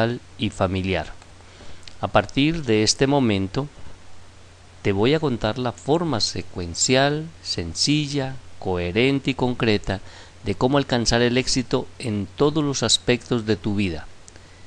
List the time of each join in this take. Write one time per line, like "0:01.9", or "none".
none

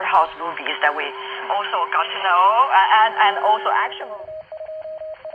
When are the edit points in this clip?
0:04.0

